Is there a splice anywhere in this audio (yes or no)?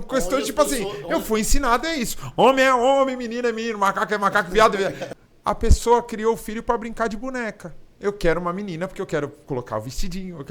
yes